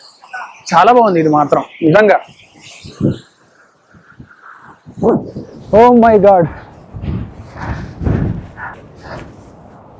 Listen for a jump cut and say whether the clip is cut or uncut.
cut